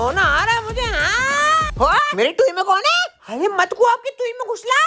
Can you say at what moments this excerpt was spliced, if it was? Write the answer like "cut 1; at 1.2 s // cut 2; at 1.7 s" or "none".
none